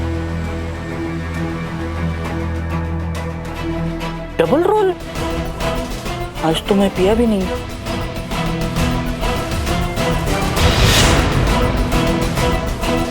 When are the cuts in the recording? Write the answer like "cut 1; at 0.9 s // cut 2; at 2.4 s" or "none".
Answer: cut 1; at 3.6 s // cut 2; at 5.2 s